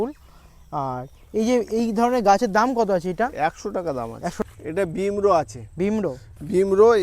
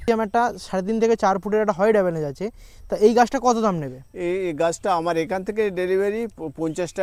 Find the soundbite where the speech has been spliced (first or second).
first